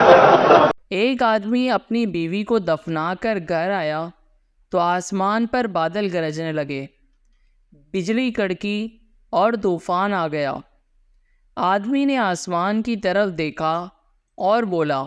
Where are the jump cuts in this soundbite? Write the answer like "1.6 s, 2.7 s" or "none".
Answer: none